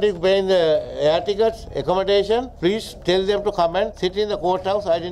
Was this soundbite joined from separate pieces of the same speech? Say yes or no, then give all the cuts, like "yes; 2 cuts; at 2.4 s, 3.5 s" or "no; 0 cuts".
yes; 1 cut; at 3.9 s